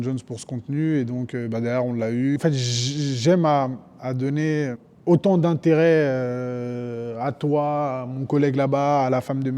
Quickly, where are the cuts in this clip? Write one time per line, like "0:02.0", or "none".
0:02.4
0:04.9

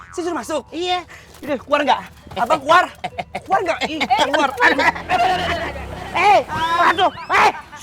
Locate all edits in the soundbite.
0:06.0

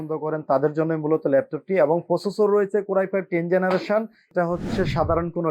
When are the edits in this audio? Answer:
0:04.3

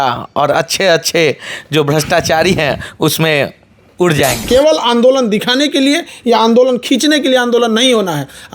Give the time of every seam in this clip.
0:04.4

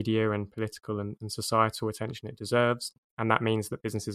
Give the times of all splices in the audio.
0:03.0

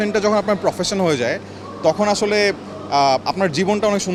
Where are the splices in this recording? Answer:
none

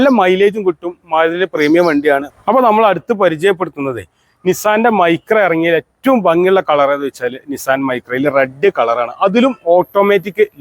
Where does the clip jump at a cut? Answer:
0:02.3

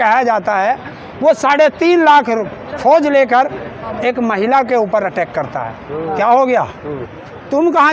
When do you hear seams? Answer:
0:06.0

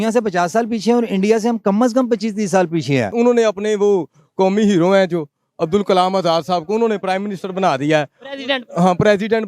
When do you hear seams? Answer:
0:03.1

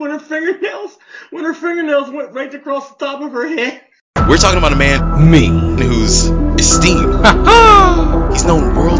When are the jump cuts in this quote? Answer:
0:03.9

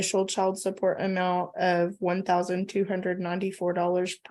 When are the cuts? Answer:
none

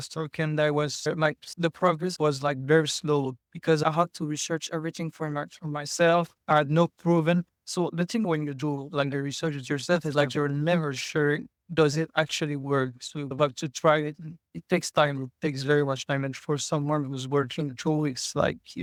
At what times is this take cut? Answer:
none

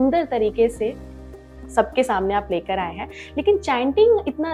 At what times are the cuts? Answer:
none

